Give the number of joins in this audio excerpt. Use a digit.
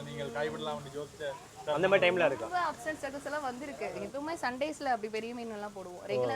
1